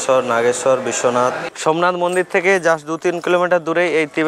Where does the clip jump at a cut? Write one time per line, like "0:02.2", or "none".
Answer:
0:01.4